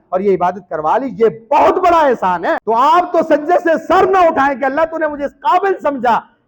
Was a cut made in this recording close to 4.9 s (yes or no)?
no